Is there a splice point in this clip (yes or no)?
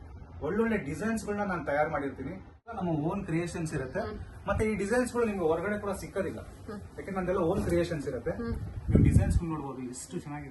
yes